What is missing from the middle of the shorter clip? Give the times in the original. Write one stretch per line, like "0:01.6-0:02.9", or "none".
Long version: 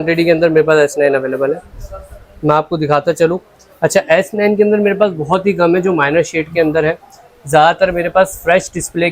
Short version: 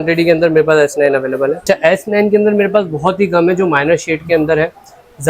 0:01.6-0:03.9